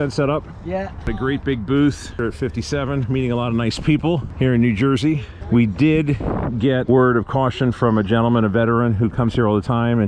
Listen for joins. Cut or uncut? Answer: cut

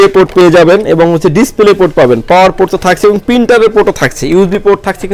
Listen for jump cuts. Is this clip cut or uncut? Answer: uncut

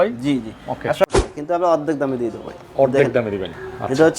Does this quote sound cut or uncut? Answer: cut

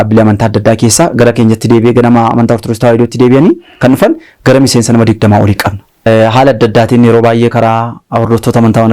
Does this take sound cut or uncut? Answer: cut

